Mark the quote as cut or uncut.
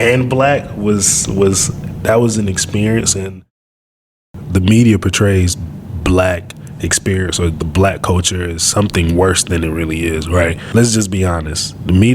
cut